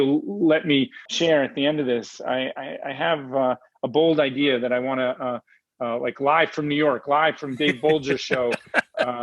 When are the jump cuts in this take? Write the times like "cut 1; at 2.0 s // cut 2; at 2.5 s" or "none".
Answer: cut 1; at 1.1 s